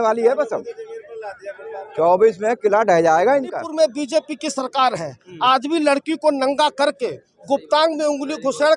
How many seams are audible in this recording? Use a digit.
1